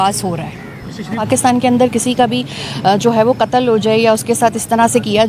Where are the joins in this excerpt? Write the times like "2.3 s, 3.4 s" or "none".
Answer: 1.3 s